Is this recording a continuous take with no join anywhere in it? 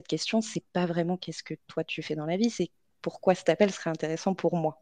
yes; 0 cuts

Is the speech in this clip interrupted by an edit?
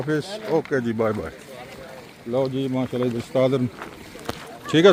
no; 0 cuts

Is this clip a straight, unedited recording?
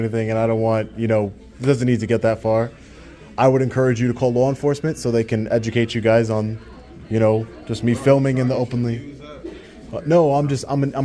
yes; 0 cuts

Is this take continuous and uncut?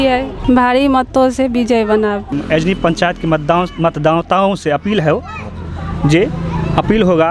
no; 1 cut; at 2.2 s

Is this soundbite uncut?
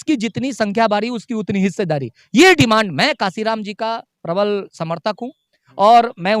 yes; 0 cuts

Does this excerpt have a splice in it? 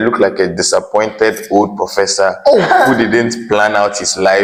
no; 0 cuts

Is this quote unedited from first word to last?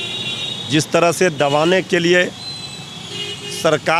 yes; 0 cuts

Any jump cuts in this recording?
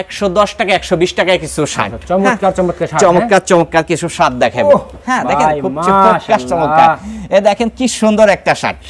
no; 0 cuts

